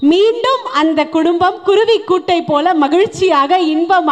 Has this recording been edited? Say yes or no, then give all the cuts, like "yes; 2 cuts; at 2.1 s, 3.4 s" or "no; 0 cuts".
no; 0 cuts